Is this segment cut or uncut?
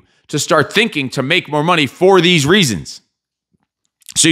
uncut